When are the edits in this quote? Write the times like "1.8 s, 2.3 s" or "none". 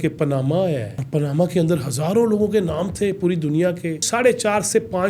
0.9 s, 4.0 s

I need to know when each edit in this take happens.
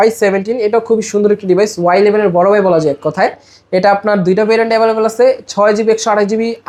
none

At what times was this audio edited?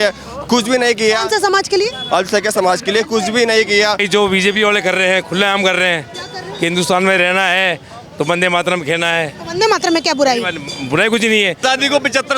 4.0 s, 11.6 s

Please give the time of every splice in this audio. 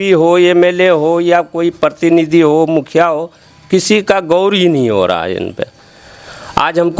none

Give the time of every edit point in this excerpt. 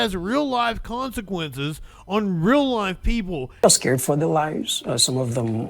3.6 s

